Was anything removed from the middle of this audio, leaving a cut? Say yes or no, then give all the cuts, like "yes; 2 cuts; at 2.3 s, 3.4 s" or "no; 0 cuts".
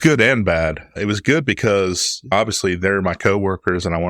yes; 2 cuts; at 0.9 s, 2.3 s